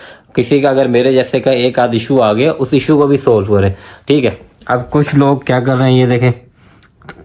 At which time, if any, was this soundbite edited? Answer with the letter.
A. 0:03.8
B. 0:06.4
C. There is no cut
C